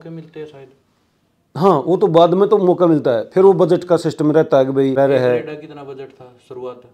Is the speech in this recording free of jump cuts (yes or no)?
no